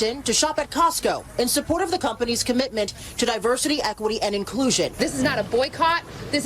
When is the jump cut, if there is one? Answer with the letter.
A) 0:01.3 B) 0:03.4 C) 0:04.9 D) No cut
C